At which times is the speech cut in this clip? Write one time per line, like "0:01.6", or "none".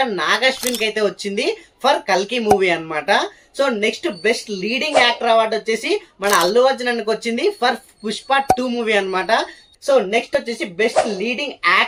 none